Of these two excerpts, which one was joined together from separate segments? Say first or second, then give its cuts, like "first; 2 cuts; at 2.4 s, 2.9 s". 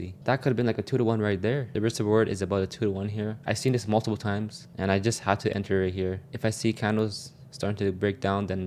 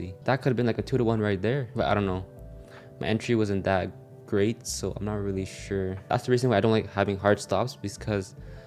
first; 2 cuts; at 1.7 s, 6.3 s